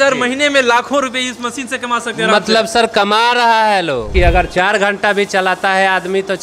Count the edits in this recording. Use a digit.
1